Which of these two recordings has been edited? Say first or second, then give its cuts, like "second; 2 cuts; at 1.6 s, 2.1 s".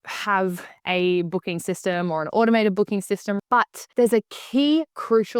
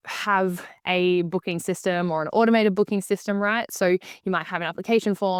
first; 1 cut; at 3.4 s